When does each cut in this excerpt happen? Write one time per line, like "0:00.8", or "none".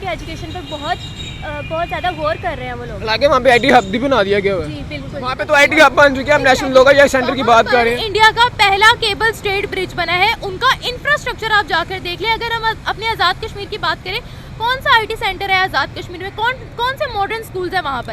0:05.3